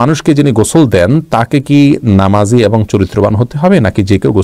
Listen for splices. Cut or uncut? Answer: uncut